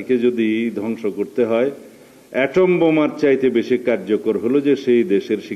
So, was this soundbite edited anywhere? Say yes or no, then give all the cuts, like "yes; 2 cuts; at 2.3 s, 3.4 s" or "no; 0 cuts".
no; 0 cuts